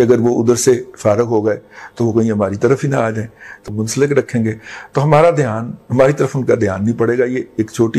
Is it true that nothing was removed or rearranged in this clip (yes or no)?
no